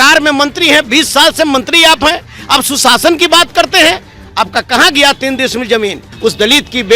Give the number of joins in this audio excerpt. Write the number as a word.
one